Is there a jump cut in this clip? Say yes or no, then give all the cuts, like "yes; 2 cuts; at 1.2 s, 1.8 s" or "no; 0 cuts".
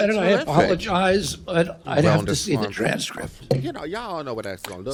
no; 0 cuts